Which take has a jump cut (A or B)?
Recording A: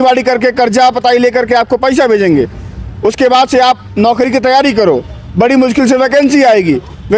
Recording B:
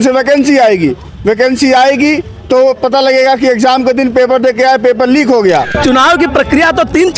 B